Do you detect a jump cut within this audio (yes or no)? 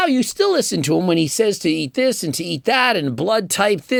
no